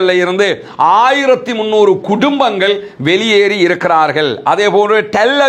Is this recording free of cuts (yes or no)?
yes